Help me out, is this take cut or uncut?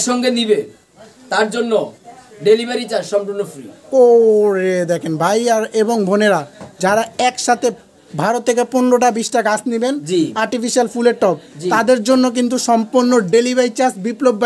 uncut